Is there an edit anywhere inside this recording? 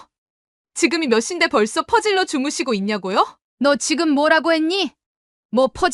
yes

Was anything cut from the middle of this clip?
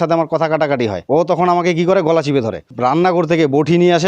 yes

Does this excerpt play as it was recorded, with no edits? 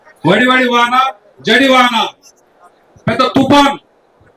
yes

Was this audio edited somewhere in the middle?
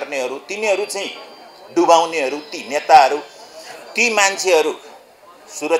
no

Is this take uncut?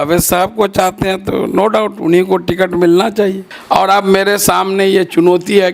no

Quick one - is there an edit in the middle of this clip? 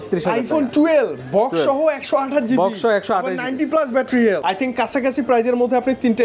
yes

